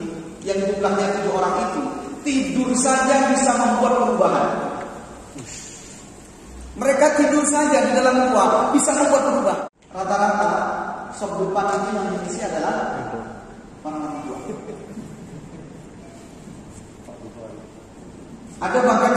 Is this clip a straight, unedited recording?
no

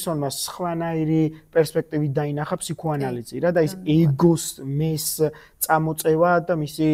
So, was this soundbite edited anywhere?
no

